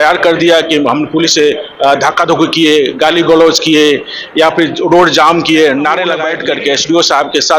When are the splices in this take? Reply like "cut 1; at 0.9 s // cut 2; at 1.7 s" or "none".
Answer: cut 1; at 6.3 s